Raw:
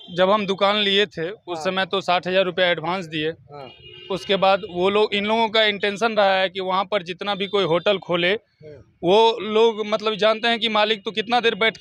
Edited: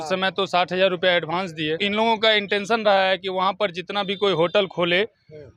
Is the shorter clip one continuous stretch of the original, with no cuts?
no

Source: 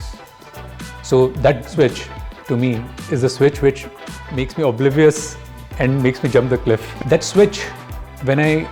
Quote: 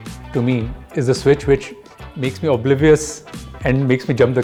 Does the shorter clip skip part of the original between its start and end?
no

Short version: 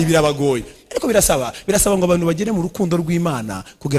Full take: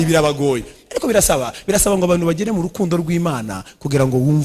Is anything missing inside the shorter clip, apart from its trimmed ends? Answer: no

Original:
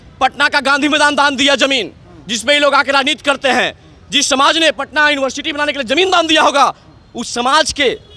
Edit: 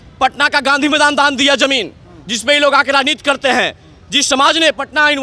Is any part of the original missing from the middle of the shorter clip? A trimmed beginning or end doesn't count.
no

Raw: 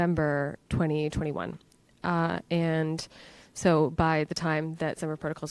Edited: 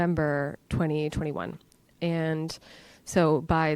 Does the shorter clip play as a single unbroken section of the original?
no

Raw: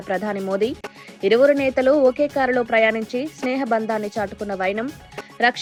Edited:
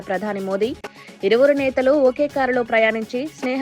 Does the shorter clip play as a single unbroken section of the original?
yes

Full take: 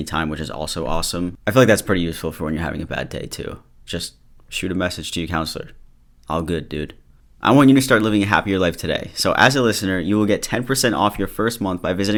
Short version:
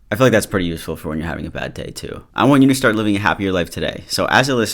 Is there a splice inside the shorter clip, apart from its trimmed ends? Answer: yes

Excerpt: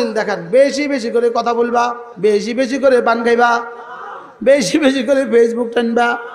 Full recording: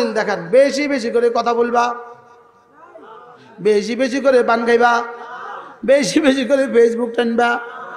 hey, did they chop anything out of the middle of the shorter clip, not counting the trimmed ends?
yes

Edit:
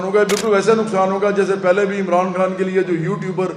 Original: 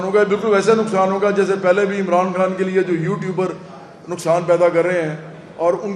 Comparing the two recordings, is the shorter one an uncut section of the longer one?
yes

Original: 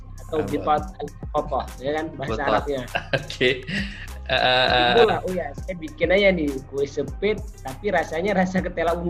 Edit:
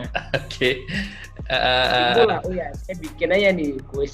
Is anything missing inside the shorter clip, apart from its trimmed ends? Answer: no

